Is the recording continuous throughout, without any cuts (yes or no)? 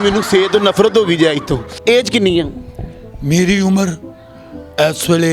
no